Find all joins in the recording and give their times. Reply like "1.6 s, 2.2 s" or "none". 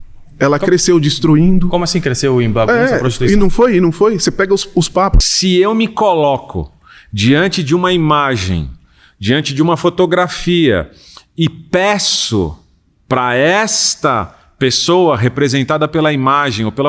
5.2 s